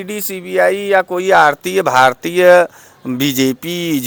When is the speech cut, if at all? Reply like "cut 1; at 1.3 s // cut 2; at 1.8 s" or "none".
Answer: none